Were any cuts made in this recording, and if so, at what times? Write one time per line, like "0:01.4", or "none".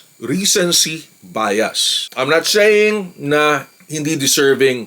none